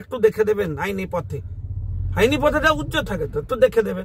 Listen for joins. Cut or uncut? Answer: uncut